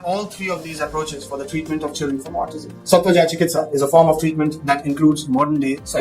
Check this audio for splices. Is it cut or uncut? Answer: cut